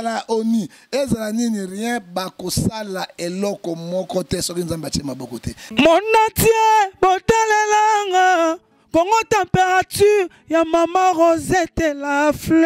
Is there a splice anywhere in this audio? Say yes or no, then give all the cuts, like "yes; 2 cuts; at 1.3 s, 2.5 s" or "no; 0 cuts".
yes; 1 cut; at 5.6 s